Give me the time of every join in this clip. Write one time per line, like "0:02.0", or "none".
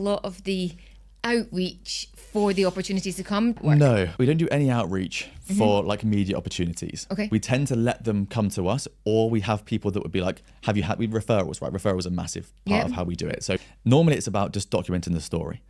0:04.0